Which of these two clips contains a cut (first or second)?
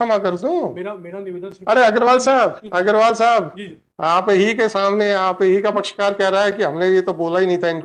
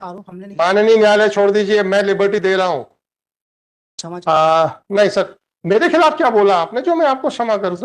second